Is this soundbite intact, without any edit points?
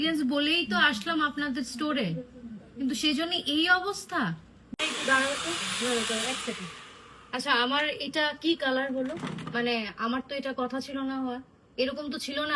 no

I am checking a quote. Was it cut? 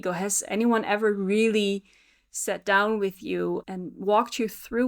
yes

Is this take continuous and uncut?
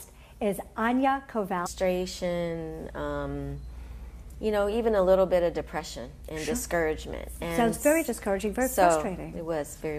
yes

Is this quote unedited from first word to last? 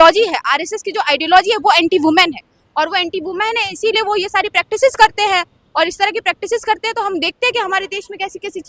yes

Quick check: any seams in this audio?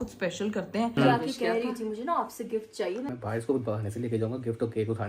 yes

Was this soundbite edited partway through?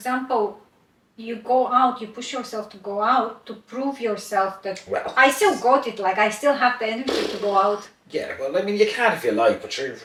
no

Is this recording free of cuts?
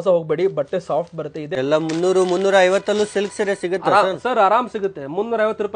no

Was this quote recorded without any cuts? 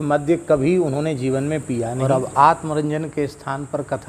no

